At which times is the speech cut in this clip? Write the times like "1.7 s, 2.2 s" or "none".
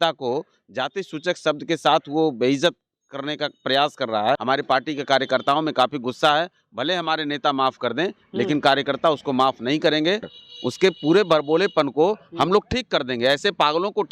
4.4 s, 10.3 s